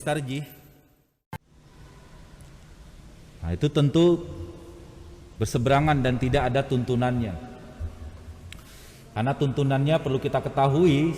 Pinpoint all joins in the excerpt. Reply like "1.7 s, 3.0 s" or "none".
1.5 s